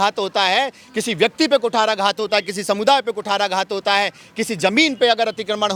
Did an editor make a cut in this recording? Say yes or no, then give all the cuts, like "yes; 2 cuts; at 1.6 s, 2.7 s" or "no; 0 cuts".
no; 0 cuts